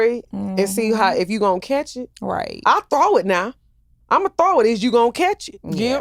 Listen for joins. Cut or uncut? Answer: uncut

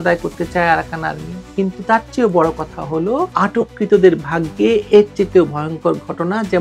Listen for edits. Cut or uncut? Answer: uncut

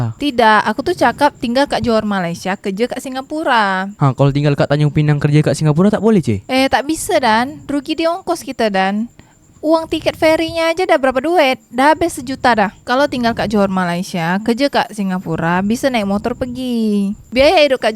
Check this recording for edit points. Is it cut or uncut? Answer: uncut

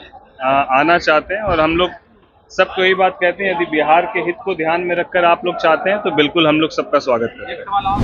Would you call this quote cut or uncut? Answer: uncut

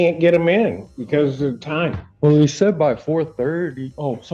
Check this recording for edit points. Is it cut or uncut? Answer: cut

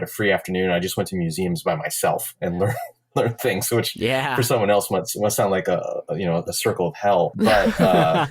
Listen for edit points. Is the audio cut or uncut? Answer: cut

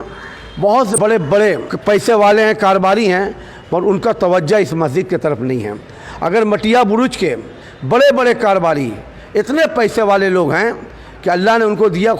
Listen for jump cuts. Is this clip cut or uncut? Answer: cut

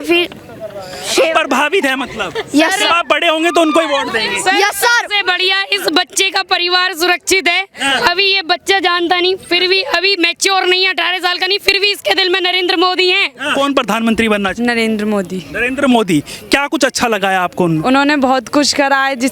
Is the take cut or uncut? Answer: cut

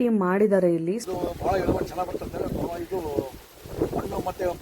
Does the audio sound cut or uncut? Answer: cut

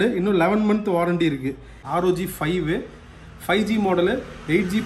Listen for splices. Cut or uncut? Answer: cut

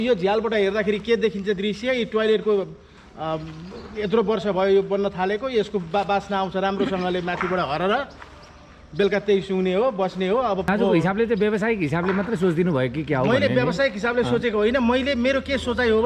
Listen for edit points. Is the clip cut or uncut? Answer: cut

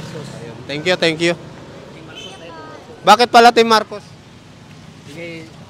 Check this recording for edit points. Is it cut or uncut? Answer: uncut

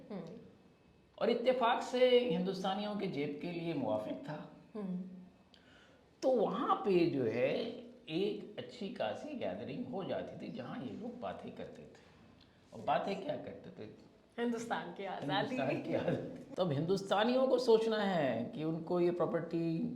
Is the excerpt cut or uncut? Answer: cut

